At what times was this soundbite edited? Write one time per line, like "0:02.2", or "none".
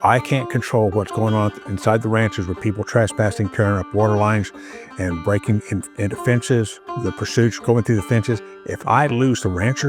none